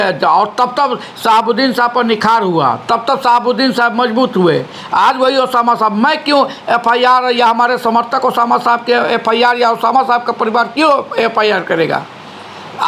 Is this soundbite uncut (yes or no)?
yes